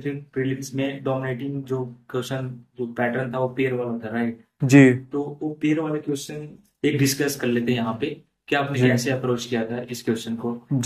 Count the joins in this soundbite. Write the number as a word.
zero